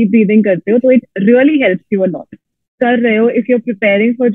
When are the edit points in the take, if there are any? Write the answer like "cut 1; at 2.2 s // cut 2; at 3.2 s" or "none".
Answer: cut 1; at 2.6 s